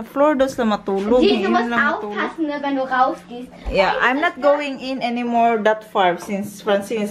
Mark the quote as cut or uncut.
uncut